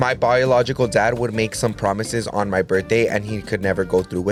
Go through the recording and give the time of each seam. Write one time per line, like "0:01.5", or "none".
none